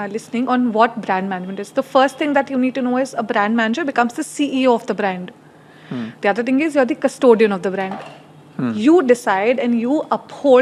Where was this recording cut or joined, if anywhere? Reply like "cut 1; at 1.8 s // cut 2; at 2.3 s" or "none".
none